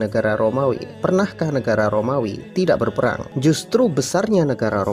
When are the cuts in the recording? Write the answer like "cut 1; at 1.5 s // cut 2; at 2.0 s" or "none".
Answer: cut 1; at 3.3 s